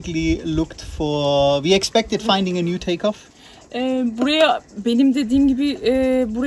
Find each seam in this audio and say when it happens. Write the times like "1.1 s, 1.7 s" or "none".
none